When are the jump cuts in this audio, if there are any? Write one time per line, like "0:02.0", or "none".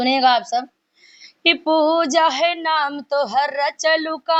none